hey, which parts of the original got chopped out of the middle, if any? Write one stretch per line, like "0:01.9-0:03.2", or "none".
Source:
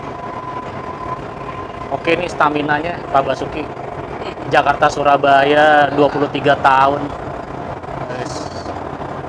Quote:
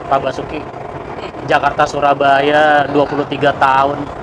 none